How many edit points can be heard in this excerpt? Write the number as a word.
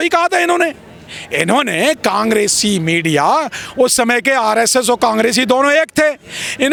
zero